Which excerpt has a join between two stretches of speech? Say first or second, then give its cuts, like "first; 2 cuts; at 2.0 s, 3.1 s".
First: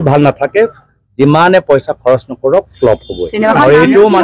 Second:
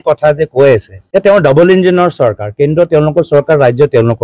second; 1 cut; at 0.9 s